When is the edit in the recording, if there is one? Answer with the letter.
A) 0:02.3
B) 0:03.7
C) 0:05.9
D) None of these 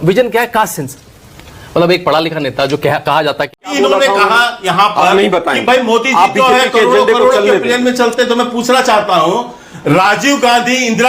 B